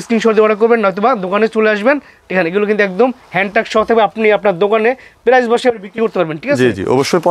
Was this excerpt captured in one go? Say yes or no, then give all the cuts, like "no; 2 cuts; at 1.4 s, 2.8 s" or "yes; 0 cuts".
yes; 0 cuts